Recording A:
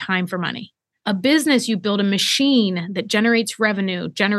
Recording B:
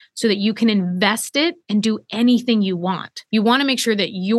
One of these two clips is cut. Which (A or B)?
B